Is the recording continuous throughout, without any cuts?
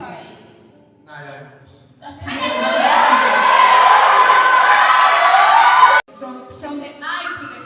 no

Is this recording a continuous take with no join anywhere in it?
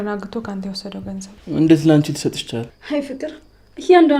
no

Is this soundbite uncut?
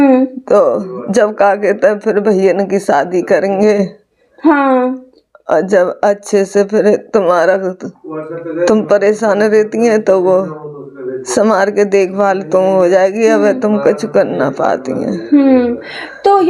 yes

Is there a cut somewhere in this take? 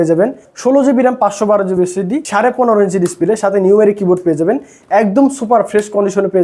no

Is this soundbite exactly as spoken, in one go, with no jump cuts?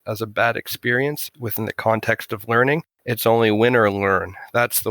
yes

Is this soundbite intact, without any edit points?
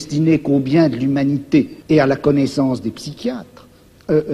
no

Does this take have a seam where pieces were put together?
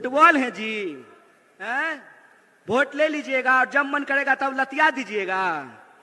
no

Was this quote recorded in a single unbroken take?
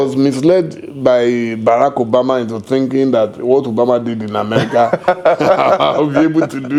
yes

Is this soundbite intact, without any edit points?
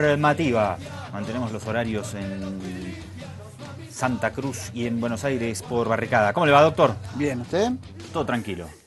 yes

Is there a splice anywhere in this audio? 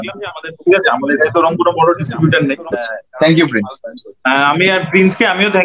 yes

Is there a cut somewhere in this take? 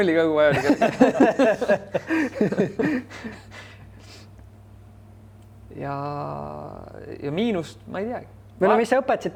no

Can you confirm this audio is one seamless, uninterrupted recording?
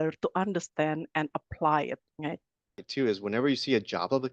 no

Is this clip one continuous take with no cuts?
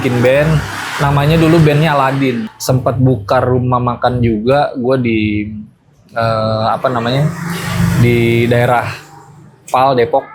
no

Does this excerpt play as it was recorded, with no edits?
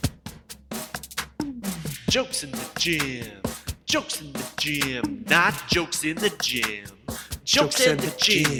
yes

